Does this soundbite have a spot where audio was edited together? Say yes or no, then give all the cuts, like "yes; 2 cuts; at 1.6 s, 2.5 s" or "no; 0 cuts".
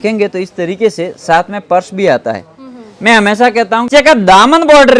yes; 1 cut; at 3.9 s